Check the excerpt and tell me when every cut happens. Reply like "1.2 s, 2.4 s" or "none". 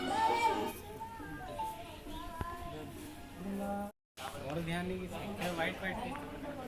4.0 s